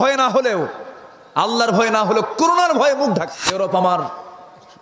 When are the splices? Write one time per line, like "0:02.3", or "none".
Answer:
0:03.4